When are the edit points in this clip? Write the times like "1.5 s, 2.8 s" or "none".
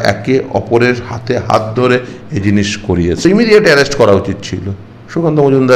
3.2 s